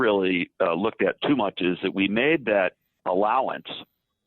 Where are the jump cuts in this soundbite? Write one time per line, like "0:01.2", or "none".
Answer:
0:03.0